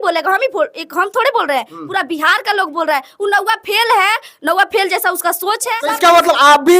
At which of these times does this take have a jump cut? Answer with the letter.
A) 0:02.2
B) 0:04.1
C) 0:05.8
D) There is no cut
C